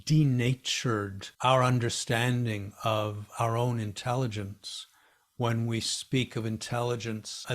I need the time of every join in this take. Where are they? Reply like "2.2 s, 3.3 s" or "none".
1.2 s